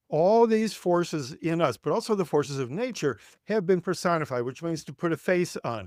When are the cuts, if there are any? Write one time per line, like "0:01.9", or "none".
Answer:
none